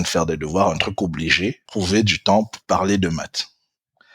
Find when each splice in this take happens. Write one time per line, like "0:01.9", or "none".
0:01.6